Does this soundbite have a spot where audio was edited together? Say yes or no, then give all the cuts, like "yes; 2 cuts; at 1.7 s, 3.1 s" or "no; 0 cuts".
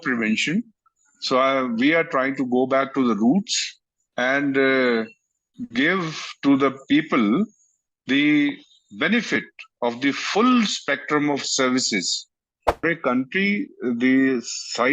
yes; 1 cut; at 12.8 s